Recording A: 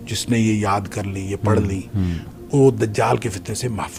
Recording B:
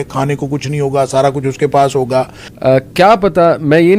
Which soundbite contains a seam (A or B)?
B